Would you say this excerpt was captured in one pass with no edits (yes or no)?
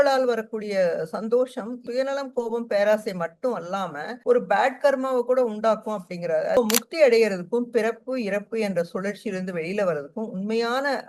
no